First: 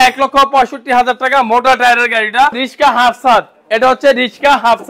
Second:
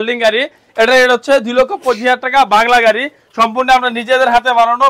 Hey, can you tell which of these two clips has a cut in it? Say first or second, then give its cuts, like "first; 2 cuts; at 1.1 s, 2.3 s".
first; 1 cut; at 2.7 s